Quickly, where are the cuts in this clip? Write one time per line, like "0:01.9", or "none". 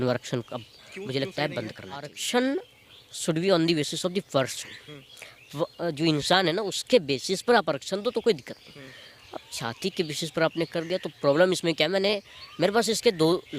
0:02.2